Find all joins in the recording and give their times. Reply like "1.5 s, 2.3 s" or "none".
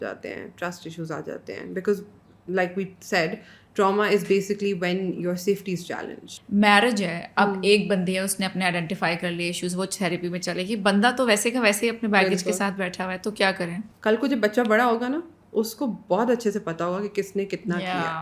6.2 s, 13.8 s